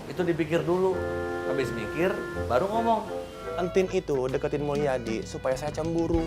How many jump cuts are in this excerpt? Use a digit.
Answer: 1